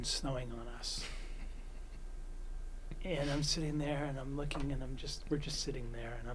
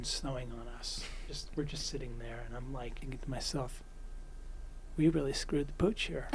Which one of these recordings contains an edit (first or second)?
second